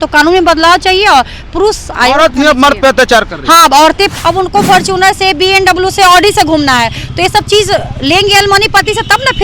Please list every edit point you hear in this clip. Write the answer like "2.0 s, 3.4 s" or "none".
4.1 s